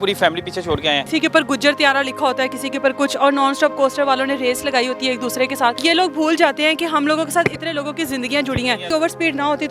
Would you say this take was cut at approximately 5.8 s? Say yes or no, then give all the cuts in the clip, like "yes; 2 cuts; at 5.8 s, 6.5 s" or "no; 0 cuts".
yes; 3 cuts; at 1.1 s, 5.8 s, 8.9 s